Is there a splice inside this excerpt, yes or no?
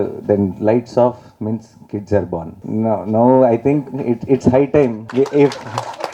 yes